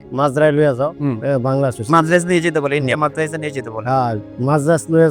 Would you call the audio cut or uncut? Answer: uncut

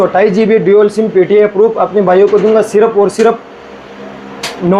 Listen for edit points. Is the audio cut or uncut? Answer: uncut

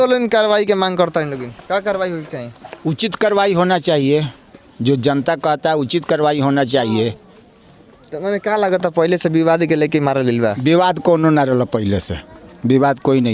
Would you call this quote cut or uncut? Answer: uncut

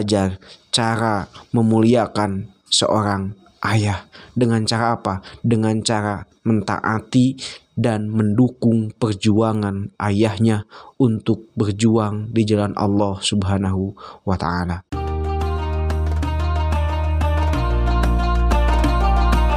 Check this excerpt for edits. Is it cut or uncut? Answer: cut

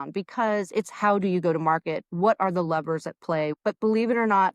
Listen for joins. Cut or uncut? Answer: cut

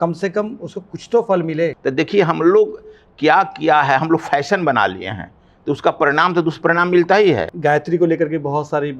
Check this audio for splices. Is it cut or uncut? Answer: cut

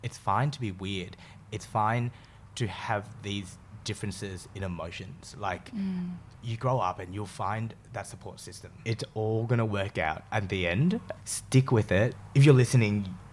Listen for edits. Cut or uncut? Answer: cut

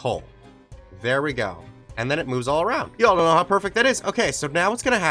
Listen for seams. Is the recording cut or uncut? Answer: cut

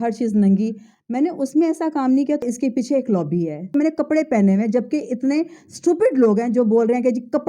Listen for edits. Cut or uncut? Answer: cut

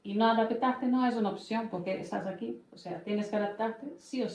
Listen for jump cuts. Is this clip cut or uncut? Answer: uncut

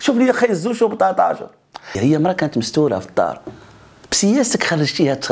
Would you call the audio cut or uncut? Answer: cut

